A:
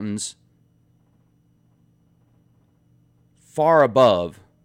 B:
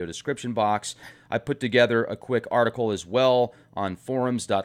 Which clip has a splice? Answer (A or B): A